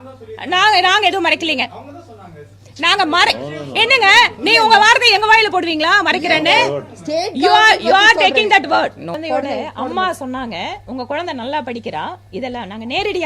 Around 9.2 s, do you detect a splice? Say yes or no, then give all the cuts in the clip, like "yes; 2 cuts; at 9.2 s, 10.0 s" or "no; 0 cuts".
yes; 1 cut; at 9.2 s